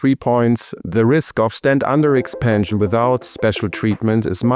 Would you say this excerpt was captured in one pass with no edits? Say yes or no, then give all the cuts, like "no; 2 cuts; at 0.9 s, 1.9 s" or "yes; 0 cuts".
yes; 0 cuts